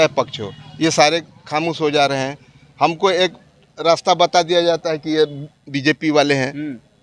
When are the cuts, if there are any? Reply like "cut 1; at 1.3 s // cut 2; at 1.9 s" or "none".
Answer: none